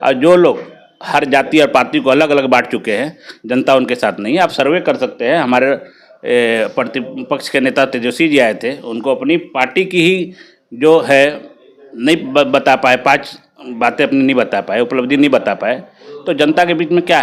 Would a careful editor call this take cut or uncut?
uncut